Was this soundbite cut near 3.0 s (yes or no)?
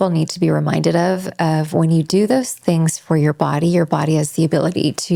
no